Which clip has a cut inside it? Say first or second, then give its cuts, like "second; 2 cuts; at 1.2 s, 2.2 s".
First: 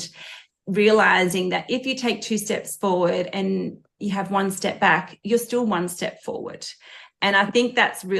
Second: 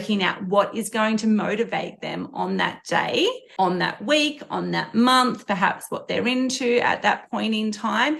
second; 1 cut; at 3.4 s